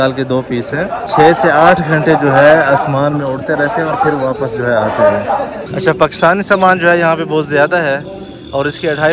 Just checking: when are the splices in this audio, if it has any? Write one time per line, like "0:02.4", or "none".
0:01.1
0:05.6